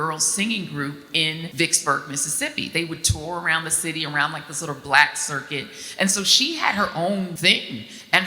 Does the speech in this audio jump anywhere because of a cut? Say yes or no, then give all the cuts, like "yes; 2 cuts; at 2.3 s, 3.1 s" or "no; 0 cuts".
yes; 2 cuts; at 1.5 s, 7.4 s